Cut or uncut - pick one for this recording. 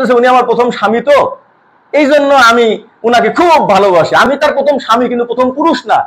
cut